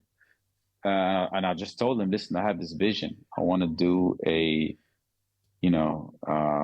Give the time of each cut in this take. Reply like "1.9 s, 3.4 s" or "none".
none